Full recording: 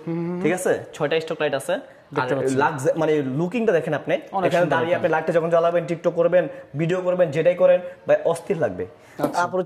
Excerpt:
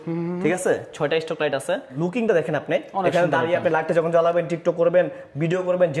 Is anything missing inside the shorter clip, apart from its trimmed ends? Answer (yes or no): yes